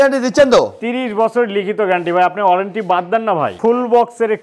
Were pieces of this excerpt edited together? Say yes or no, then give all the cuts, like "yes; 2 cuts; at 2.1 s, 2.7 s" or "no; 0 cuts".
yes; 1 cut; at 3.5 s